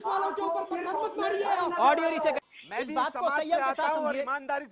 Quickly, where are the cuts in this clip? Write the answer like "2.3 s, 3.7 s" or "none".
2.5 s